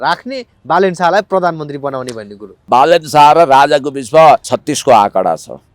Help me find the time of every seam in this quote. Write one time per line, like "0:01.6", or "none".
0:02.7
0:04.5